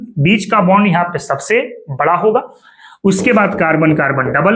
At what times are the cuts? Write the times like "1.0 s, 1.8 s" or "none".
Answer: none